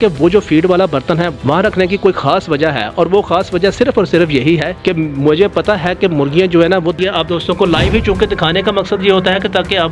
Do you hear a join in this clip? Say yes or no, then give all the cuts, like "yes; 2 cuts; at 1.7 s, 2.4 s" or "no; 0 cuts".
yes; 2 cuts; at 4.7 s, 7.0 s